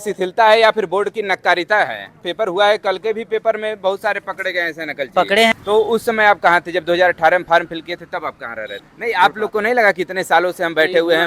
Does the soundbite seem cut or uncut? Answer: cut